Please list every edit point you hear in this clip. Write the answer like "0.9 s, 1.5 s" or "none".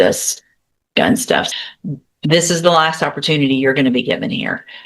1.5 s